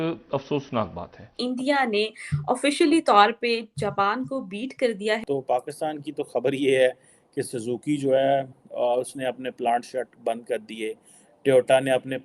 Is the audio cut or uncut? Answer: cut